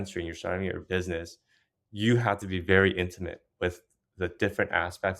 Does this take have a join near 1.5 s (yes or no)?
no